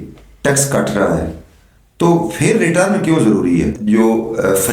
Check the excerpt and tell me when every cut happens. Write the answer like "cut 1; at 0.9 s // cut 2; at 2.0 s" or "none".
cut 1; at 3.8 s